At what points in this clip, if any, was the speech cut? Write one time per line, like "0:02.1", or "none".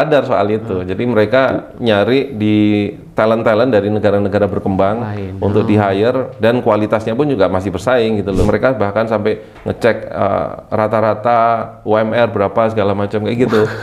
0:08.4